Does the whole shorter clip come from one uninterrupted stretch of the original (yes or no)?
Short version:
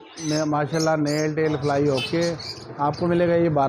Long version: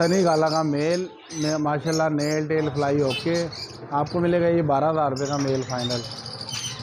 yes